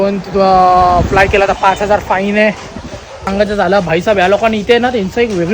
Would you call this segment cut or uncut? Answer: cut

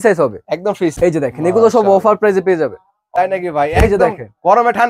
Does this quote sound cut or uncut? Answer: cut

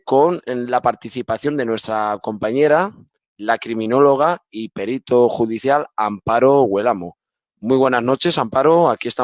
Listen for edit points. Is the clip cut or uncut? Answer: cut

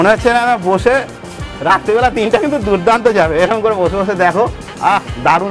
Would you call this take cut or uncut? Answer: uncut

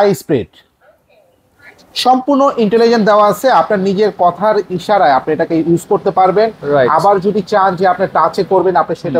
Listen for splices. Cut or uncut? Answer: uncut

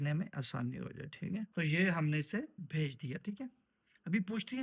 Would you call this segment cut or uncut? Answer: uncut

